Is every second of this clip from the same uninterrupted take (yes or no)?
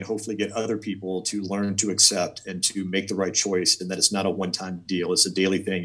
yes